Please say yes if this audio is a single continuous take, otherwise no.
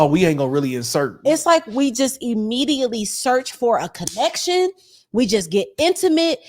no